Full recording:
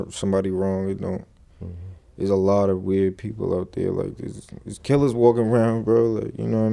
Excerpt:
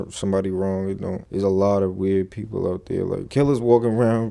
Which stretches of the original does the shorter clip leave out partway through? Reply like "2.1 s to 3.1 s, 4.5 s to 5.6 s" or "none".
1.2 s to 2.1 s, 4.1 s to 4.8 s